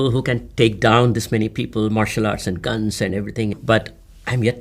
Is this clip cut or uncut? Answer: cut